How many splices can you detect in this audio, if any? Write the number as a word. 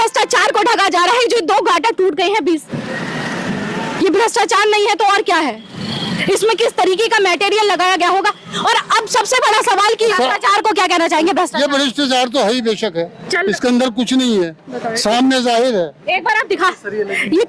two